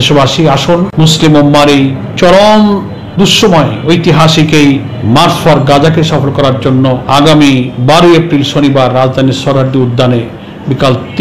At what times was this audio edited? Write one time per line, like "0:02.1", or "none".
0:00.9
0:02.0
0:04.9
0:07.0
0:07.7